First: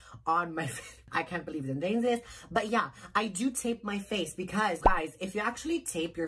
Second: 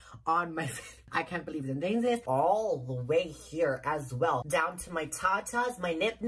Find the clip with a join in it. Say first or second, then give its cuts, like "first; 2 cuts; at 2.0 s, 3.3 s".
second; 2 cuts; at 2.2 s, 4.5 s